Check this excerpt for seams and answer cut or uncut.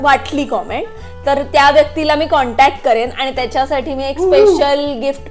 uncut